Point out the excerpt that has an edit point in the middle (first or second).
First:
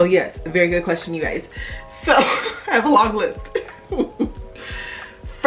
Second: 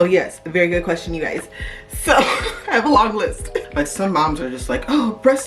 second